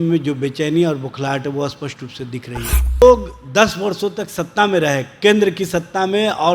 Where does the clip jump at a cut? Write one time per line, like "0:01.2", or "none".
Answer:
0:03.0

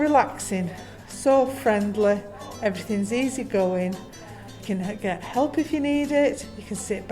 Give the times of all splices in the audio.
0:04.6

